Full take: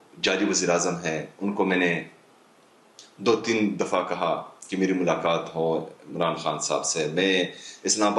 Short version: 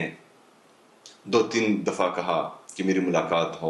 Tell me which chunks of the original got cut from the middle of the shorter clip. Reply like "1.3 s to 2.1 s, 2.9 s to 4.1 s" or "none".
none